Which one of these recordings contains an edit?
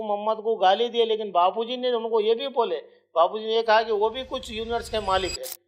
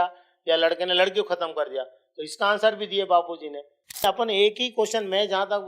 second; 1 cut; at 4.0 s

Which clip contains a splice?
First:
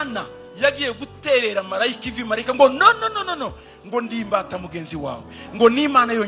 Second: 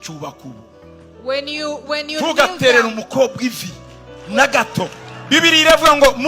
second; 1 cut; at 5.1 s

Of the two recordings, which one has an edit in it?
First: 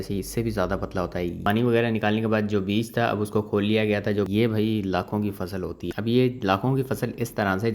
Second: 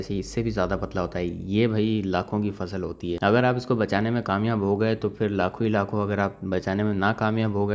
first; 3 cuts; at 1.4 s, 4.3 s, 5.9 s

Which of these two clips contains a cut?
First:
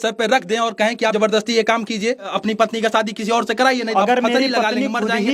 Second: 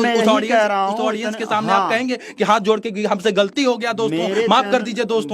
first; 3 cuts; at 1.1 s, 2.3 s, 3.9 s

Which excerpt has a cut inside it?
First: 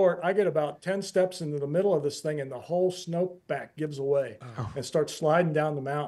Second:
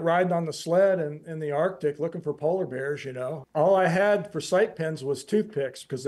second; 1 cut; at 3.4 s

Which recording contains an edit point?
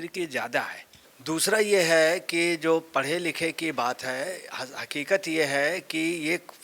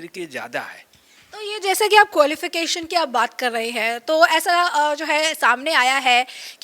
first; 1 cut; at 1.1 s

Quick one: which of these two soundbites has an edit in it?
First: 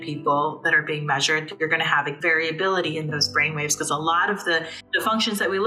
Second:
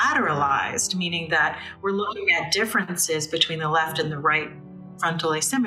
first; 2 cuts; at 2.1 s, 4.8 s

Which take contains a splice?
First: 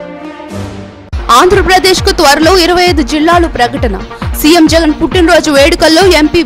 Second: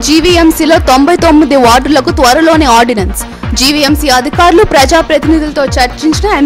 first; 1 cut; at 1.0 s

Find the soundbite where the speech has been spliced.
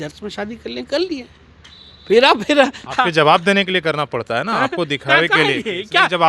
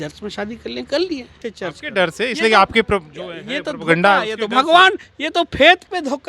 second; 1 cut; at 1.5 s

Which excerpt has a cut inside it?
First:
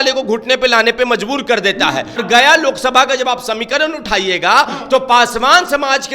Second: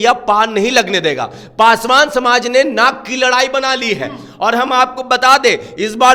first; 1 cut; at 2.2 s

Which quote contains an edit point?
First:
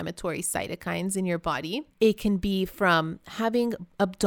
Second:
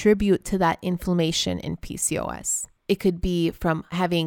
first; 1 cut; at 1.9 s

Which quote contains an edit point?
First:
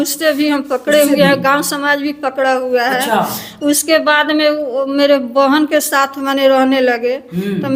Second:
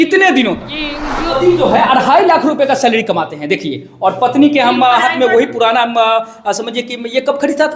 second; 1 cut; at 1.4 s

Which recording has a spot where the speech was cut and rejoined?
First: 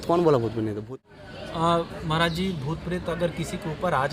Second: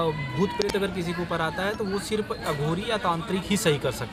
first; 1 cut; at 0.9 s

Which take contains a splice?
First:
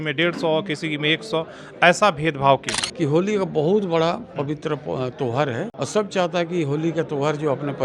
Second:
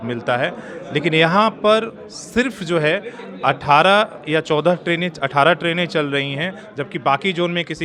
first; 2 cuts; at 2.8 s, 5.7 s

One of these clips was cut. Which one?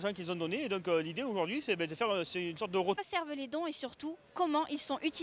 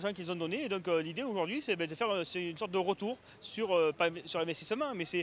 second; 1 cut; at 3.0 s

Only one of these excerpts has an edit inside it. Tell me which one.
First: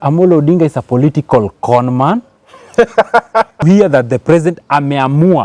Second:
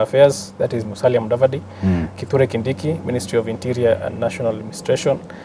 first; 1 cut; at 3.6 s

